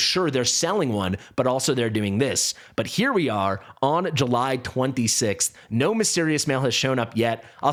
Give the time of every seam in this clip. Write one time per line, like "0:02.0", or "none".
none